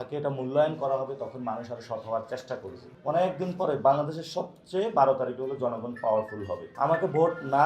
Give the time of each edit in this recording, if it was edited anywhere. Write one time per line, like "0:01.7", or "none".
0:02.8
0:06.6